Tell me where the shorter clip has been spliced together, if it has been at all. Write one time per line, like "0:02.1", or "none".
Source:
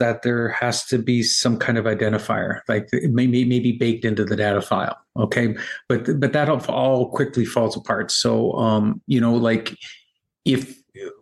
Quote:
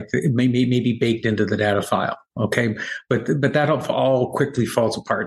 none